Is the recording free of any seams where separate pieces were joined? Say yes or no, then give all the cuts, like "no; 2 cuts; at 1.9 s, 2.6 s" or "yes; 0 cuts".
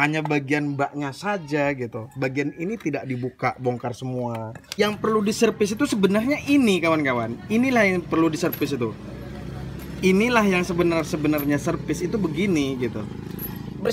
no; 1 cut; at 4.7 s